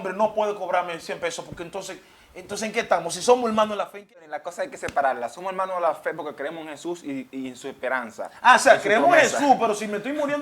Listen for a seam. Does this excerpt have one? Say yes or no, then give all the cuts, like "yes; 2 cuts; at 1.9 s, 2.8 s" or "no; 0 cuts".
yes; 1 cut; at 4.1 s